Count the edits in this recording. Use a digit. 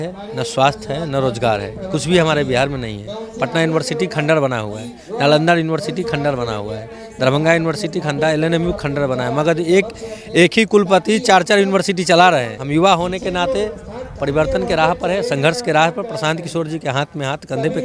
1